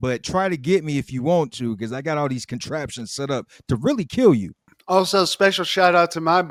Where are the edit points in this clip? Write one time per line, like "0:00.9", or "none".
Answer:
none